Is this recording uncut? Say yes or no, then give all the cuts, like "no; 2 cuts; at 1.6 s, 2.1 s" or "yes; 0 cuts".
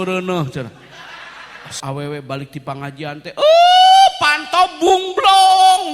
no; 1 cut; at 1.7 s